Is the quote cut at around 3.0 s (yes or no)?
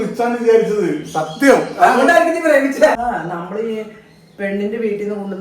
yes